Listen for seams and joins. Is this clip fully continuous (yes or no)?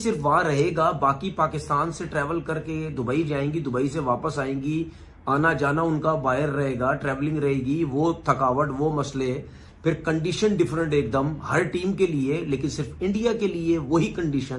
yes